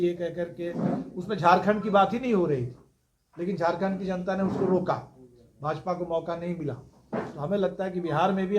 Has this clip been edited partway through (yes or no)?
no